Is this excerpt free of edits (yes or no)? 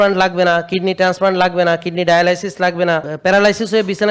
no